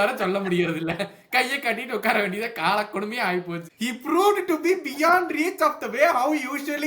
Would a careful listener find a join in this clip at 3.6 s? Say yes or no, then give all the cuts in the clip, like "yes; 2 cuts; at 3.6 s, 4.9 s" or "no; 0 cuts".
yes; 1 cut; at 3.6 s